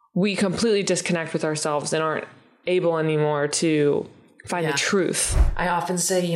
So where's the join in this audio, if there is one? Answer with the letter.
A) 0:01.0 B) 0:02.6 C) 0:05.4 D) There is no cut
C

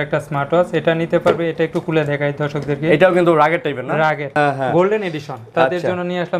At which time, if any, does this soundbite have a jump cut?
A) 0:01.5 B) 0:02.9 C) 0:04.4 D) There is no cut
C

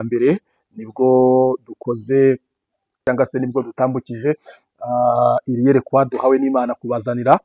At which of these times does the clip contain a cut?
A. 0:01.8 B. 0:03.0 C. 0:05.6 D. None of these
B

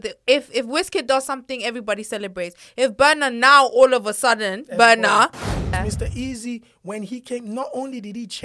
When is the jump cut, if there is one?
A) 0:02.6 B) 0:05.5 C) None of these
B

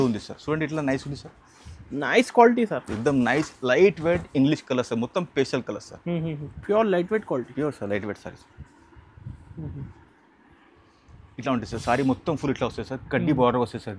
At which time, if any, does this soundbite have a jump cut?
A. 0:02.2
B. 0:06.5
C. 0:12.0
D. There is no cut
B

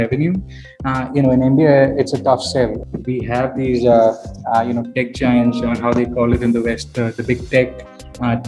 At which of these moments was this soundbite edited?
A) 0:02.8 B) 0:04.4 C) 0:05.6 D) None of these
A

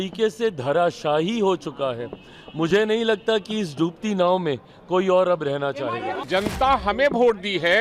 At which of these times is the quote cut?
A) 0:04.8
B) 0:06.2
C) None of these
B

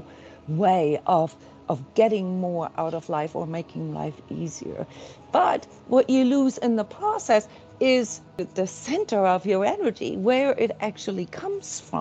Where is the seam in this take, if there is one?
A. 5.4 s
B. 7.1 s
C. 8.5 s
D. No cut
C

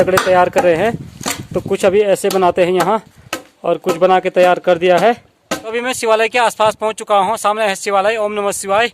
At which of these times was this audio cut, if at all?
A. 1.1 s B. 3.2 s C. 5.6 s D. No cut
C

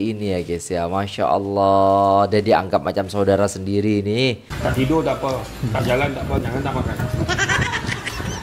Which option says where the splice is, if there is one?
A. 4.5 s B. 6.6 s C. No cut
A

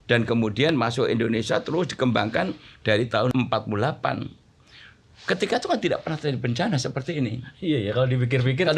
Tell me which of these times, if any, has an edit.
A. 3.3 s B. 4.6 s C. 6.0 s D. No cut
A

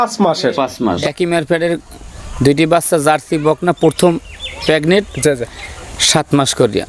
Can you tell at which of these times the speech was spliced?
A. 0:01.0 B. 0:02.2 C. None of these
A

